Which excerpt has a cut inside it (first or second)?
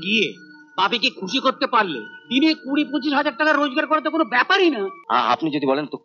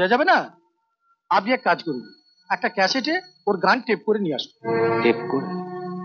first